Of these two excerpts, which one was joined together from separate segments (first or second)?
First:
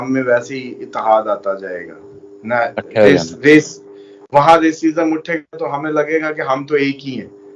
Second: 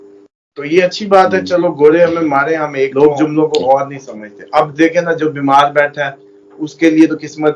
second